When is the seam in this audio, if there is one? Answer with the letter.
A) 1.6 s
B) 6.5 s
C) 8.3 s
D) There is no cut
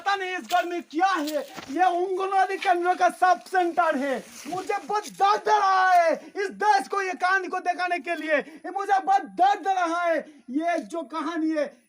A